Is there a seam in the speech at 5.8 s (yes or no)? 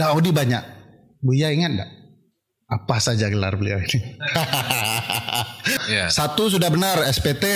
yes